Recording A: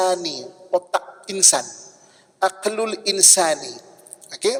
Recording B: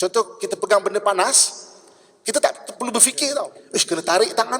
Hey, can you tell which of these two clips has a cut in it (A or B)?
B